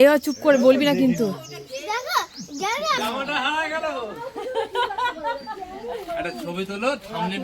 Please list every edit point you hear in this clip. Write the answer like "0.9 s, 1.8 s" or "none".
3.0 s